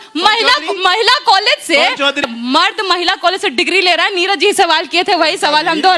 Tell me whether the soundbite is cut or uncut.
cut